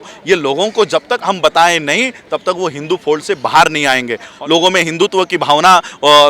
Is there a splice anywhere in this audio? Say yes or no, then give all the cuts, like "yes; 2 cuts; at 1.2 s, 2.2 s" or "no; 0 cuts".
yes; 1 cut; at 4.3 s